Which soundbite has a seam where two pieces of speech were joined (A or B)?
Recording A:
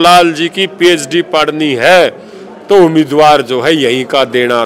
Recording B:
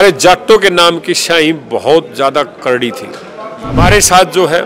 B